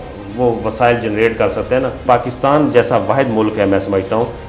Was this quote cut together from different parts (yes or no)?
yes